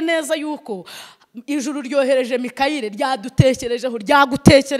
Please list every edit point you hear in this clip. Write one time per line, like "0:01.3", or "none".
none